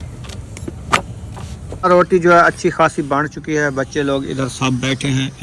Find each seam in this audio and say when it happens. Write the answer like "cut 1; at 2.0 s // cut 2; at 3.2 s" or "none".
cut 1; at 1.9 s